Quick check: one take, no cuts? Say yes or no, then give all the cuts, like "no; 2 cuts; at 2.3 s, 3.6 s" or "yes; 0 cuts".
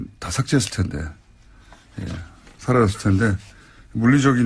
no; 1 cut; at 3.0 s